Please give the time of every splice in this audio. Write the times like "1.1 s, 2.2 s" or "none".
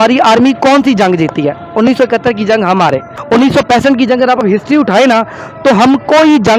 none

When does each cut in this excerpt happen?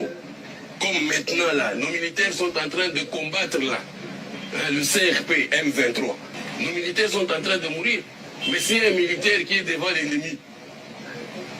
6.4 s

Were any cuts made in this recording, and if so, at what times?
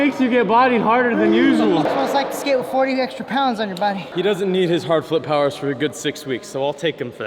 1.9 s, 4.0 s

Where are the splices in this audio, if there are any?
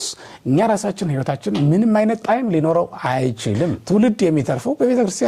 3.8 s

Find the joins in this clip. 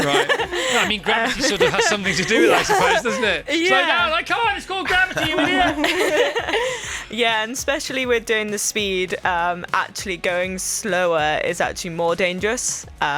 none

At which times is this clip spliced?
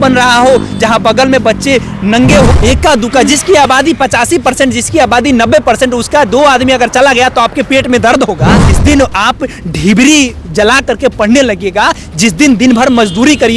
2.5 s, 8.6 s

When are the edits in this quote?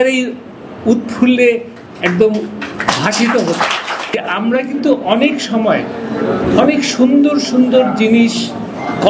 4.2 s

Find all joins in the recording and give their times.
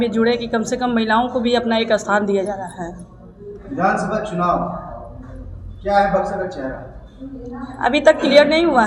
none

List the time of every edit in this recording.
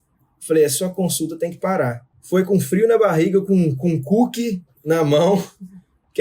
2.1 s

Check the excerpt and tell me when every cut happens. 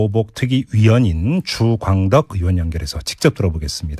none

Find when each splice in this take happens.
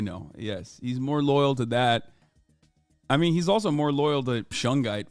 none

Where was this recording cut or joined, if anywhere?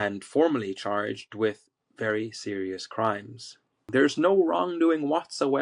3.8 s

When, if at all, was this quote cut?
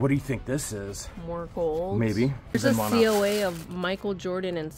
2.5 s

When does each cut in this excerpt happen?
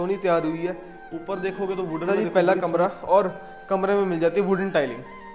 2.1 s

